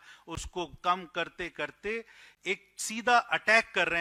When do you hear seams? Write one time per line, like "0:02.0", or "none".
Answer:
none